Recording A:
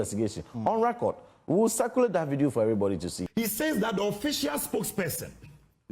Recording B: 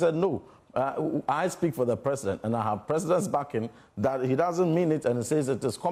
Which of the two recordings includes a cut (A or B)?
A